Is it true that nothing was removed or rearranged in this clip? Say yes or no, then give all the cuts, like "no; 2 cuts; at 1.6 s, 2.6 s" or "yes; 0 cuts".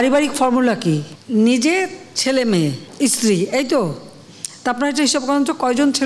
no; 2 cuts; at 1.1 s, 2.8 s